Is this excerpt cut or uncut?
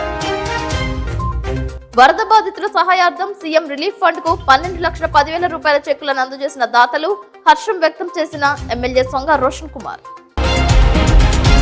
cut